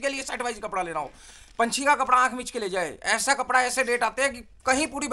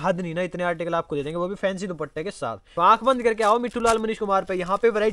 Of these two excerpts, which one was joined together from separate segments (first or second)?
second